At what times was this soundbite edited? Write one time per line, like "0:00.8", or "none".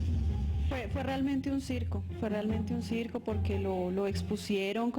none